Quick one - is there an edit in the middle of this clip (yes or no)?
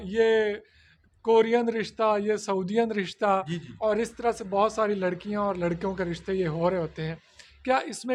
no